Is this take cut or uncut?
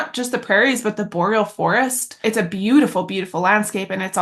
cut